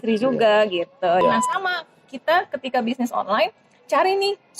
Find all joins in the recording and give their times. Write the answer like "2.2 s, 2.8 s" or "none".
1.2 s